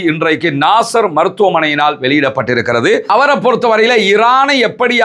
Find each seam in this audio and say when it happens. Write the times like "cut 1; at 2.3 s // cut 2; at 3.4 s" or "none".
cut 1; at 3.1 s